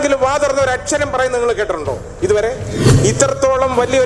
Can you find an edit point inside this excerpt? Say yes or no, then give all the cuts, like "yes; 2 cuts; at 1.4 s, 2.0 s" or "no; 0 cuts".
yes; 1 cut; at 2.9 s